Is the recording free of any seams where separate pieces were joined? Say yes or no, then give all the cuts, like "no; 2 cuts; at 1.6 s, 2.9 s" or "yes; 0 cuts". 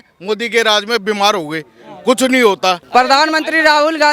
no; 1 cut; at 2.8 s